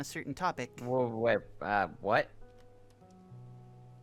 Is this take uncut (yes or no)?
yes